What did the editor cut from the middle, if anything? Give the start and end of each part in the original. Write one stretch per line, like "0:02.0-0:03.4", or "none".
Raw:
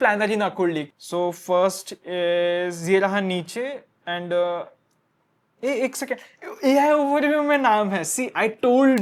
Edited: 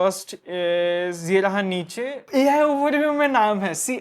0:03.8-0:06.5